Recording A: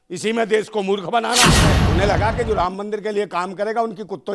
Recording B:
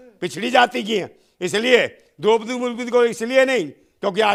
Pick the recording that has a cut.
A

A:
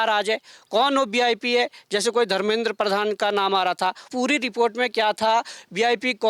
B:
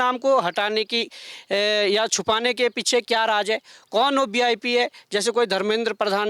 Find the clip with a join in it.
A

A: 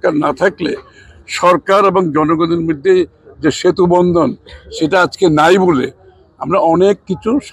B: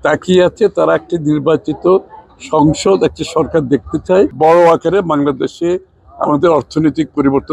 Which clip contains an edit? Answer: B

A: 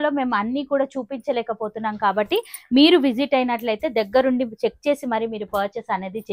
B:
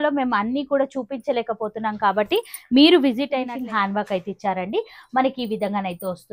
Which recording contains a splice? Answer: B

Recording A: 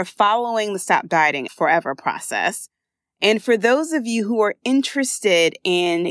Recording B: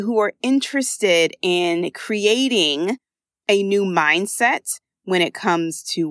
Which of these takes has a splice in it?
A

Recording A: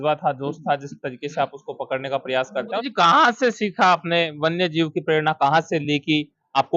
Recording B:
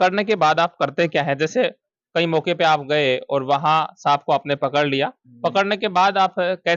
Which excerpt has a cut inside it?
A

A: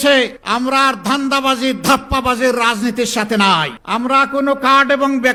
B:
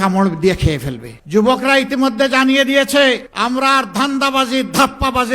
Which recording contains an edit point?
B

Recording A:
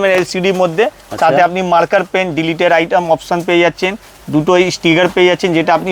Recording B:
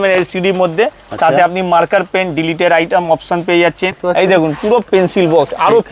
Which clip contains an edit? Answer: B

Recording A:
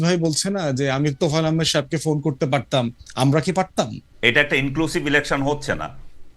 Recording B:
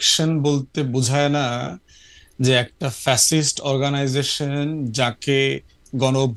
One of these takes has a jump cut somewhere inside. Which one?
A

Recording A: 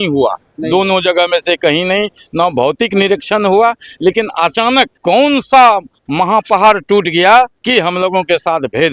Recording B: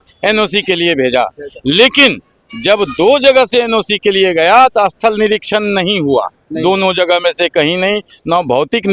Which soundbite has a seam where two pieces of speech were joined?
A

